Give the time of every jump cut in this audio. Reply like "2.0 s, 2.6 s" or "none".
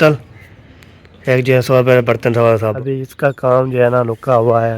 2.8 s